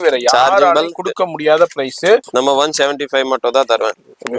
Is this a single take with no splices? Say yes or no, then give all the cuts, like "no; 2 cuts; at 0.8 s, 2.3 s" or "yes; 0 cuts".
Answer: no; 1 cut; at 2.3 s